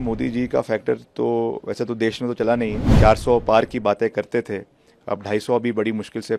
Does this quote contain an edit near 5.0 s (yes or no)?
no